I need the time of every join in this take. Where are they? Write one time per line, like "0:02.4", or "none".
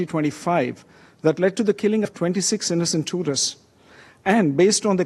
none